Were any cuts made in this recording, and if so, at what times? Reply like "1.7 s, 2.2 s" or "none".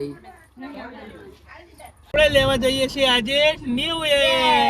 2.1 s